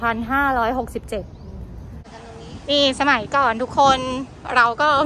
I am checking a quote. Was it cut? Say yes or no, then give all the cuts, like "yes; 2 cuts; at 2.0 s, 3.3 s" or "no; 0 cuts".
yes; 1 cut; at 2.0 s